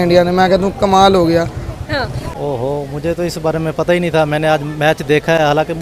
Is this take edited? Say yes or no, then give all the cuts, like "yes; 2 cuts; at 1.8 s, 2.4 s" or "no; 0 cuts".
no; 0 cuts